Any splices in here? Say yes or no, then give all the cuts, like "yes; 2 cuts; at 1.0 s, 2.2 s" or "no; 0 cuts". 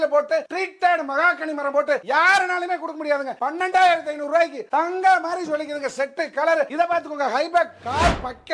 yes; 2 cuts; at 3.4 s, 6.7 s